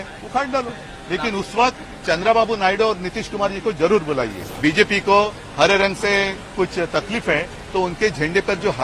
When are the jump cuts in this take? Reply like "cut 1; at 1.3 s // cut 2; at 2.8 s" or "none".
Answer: cut 1; at 4.4 s